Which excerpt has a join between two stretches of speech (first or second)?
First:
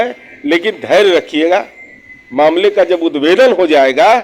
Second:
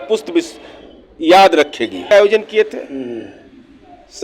second